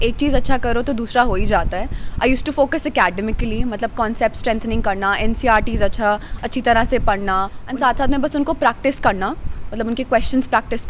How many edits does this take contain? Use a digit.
1